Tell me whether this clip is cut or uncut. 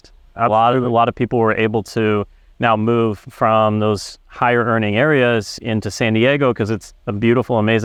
uncut